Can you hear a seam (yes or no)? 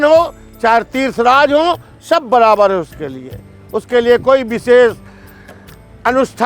no